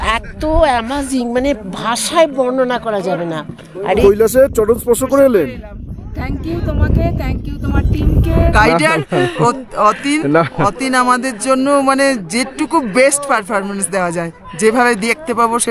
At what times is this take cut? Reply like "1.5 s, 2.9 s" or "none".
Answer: 4.0 s, 8.5 s